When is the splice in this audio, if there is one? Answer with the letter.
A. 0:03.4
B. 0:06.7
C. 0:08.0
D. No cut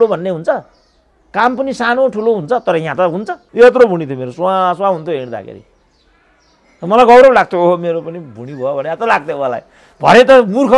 A